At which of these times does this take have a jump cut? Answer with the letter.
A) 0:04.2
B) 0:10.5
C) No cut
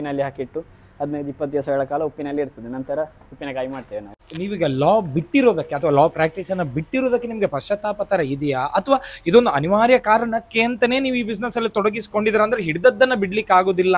A